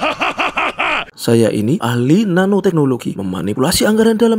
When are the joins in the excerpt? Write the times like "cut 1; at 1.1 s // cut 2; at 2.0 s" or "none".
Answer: cut 1; at 1.1 s